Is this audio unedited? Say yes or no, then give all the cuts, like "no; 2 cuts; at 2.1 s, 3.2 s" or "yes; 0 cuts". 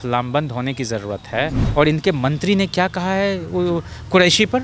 no; 1 cut; at 1.6 s